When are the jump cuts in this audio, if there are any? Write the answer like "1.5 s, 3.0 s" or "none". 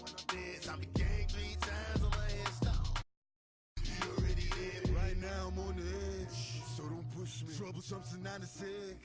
3.6 s